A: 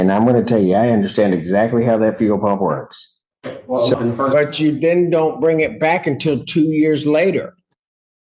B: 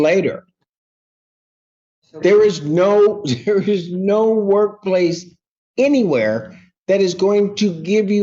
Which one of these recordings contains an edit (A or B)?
A